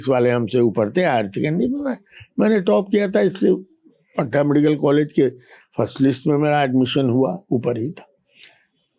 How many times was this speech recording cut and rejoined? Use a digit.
0